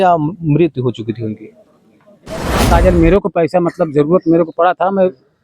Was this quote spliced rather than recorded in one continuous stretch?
yes; 1 cut; at 2.7 s

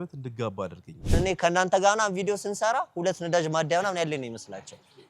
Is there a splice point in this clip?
yes; 1 cut; at 1.1 s

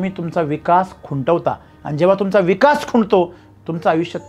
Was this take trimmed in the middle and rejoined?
no; 0 cuts

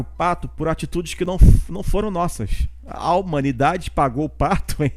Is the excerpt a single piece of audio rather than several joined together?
yes; 0 cuts

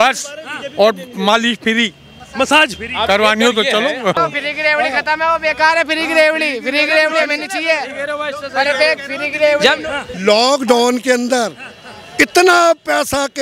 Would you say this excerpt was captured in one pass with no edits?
no; 2 cuts; at 4.2 s, 10.1 s

